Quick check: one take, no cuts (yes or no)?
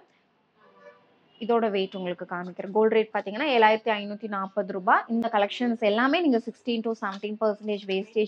yes